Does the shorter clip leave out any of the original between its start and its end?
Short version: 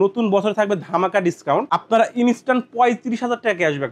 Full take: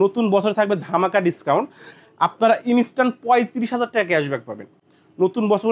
yes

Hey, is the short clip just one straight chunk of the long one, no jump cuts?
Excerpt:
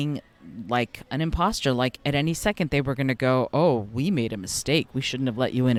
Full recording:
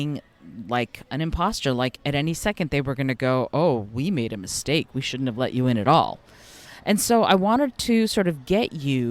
yes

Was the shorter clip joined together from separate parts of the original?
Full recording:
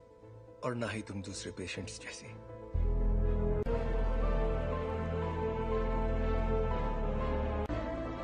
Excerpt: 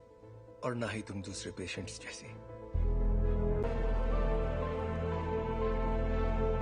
yes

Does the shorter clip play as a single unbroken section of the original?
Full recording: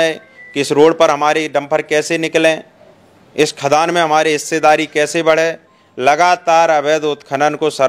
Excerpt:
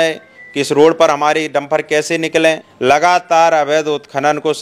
no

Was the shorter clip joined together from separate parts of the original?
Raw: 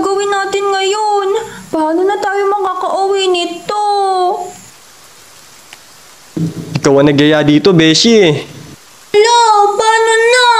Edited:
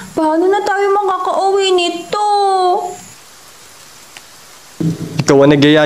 no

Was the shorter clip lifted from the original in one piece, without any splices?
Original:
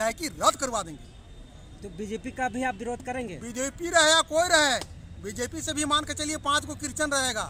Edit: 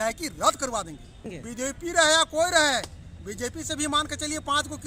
no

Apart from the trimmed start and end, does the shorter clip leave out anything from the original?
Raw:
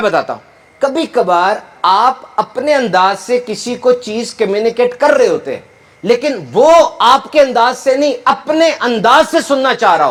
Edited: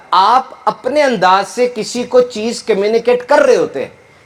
no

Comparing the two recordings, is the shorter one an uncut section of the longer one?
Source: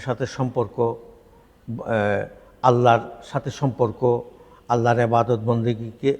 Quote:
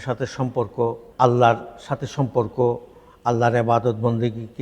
no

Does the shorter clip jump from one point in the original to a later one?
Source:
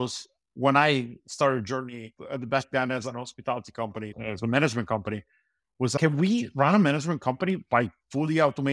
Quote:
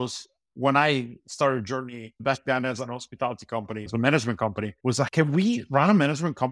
yes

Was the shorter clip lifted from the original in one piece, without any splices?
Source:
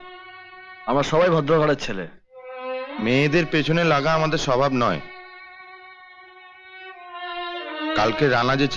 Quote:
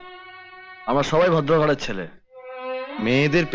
yes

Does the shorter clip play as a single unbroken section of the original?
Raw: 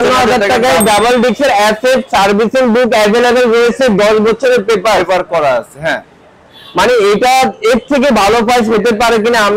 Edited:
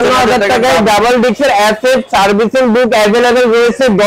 yes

